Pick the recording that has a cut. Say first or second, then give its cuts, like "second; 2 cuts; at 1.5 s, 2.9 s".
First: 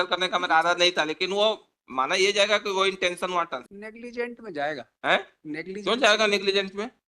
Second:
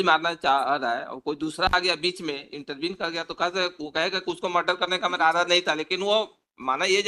first; 1 cut; at 3.7 s